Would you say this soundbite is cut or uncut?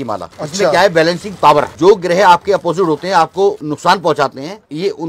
uncut